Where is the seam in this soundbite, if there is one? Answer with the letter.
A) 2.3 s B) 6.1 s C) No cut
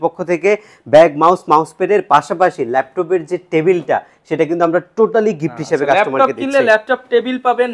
C